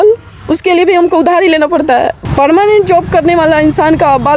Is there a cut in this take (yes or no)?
yes